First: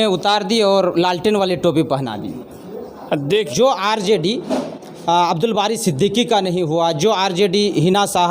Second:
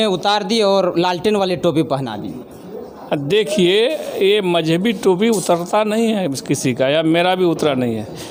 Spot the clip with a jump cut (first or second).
first